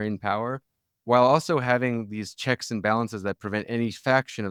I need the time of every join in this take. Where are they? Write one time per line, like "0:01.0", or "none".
none